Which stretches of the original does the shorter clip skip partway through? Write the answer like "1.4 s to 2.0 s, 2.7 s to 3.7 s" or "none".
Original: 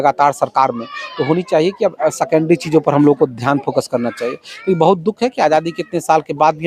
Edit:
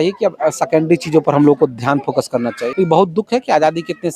4.2 s to 4.5 s

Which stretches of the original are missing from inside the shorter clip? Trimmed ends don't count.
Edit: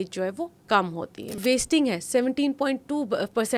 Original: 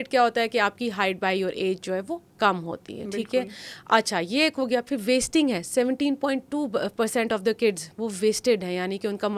3.1 s to 5.0 s

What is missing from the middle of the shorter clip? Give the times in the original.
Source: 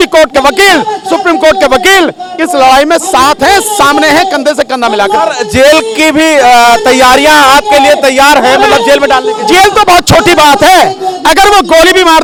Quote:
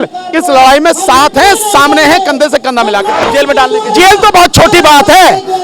5.3 s to 8.8 s

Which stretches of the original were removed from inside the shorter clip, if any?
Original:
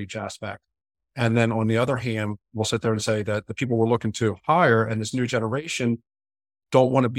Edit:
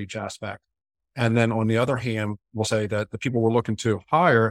2.7 s to 3.0 s

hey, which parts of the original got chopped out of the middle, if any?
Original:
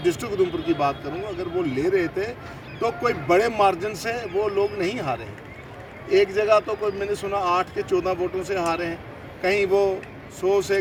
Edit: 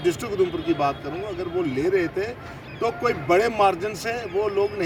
none

